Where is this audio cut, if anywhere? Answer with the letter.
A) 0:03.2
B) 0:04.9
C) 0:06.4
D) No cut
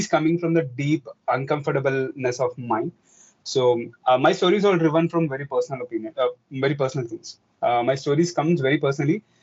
D